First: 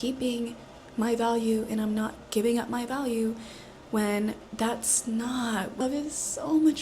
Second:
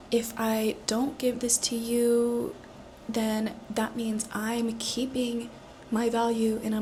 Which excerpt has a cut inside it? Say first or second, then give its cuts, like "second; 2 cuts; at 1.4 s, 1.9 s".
first; 1 cut; at 5.8 s